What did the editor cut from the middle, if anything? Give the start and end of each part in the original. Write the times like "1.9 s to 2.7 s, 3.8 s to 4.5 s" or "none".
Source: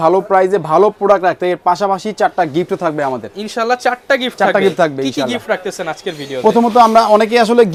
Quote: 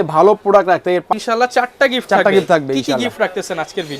1.6 s to 3.4 s